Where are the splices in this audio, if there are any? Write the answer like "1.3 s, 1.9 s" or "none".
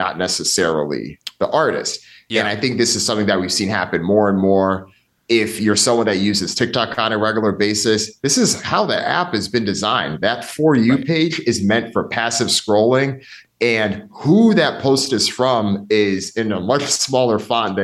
none